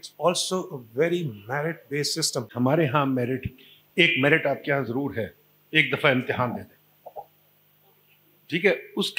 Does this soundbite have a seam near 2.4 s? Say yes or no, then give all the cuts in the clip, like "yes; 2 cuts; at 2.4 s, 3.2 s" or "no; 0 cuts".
yes; 1 cut; at 2.4 s